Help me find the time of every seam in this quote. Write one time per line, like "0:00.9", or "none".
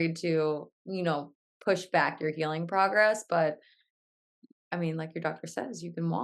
none